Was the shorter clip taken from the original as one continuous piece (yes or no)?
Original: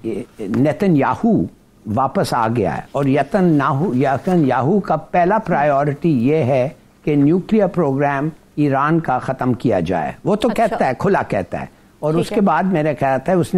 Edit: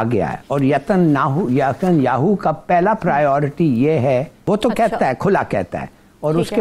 no